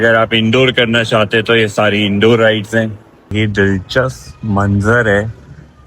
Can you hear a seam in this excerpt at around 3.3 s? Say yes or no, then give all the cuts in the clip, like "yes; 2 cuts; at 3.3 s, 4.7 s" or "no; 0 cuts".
yes; 1 cut; at 3.3 s